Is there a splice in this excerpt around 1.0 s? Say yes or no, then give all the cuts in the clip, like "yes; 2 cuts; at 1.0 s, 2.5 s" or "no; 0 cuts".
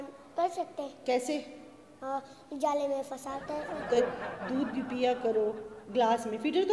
no; 1 cut; at 4.0 s